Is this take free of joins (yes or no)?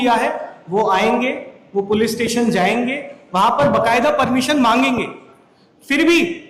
yes